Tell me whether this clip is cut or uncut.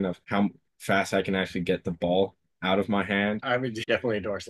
cut